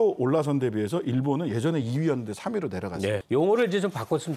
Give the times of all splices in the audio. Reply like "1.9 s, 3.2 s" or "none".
3.2 s